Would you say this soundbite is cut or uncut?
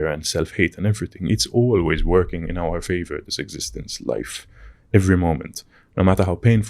uncut